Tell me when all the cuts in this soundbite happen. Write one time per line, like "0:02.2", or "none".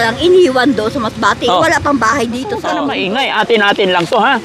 0:02.7